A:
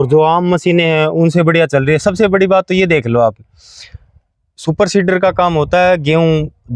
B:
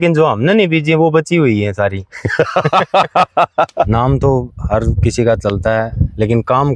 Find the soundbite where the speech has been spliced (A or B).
B